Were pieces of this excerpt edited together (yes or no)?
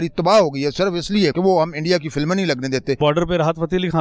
yes